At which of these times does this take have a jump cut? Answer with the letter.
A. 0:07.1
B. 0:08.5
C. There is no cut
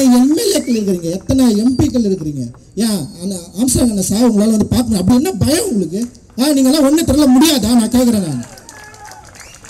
C